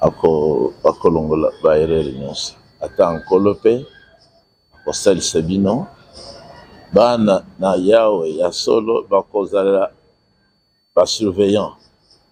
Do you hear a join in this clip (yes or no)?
no